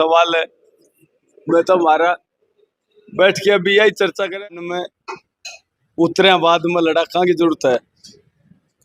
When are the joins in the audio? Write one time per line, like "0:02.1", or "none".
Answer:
0:04.3